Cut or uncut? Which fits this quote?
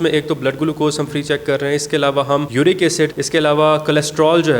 cut